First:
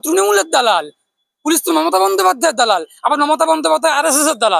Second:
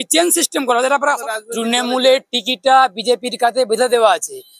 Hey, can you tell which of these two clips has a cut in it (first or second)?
second